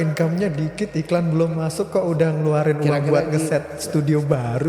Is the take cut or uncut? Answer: uncut